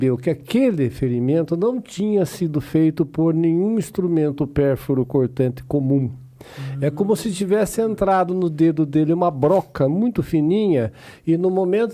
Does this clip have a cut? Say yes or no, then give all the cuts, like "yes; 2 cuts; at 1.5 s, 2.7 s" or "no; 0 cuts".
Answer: no; 0 cuts